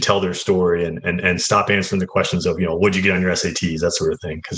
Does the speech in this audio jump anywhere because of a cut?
no; 0 cuts

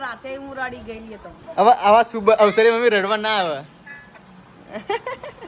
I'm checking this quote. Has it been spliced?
yes; 1 cut; at 1.3 s

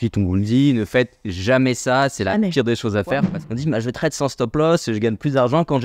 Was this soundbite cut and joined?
yes; 1 cut; at 3.3 s

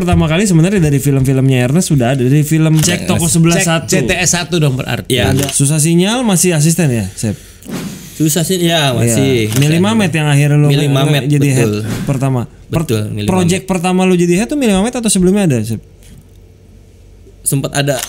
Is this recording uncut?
no; 2 cuts; at 2.9 s, 5.4 s

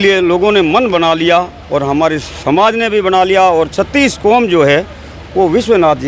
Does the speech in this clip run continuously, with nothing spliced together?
yes; 0 cuts

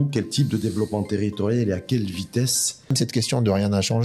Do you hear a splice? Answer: yes; 1 cut; at 2.9 s

